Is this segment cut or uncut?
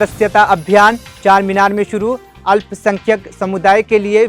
uncut